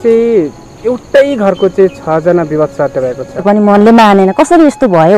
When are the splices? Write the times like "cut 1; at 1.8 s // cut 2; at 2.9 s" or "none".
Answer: cut 1; at 3.4 s